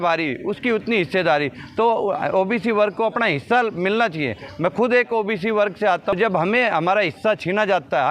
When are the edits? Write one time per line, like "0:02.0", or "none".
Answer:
0:06.1